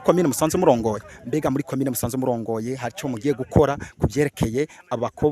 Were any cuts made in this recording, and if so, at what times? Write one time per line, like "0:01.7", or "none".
0:01.1